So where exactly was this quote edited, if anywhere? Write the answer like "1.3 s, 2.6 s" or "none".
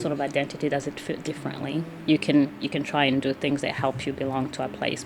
2.0 s